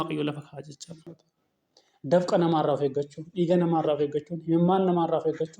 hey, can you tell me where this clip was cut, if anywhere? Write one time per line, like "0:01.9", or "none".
0:01.1